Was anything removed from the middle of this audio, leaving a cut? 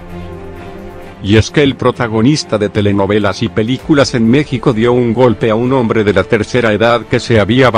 yes; 1 cut; at 1.2 s

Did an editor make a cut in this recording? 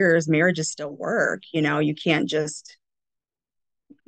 no; 0 cuts

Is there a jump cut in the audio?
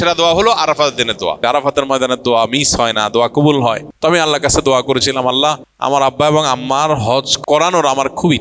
yes; 4 cuts; at 1.4 s, 3.9 s, 5.7 s, 7.3 s

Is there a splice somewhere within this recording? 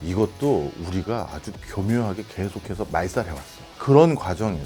yes; 1 cut; at 3.8 s

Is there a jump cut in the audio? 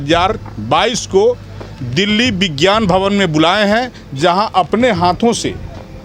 no; 0 cuts

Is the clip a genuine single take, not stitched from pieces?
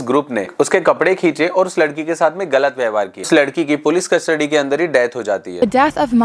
no; 1 cut; at 3.3 s

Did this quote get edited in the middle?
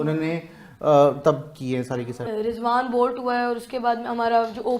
yes; 1 cut; at 2.2 s

